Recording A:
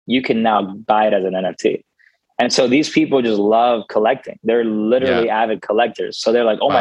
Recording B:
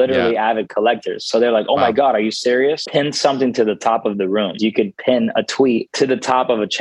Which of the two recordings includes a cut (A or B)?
B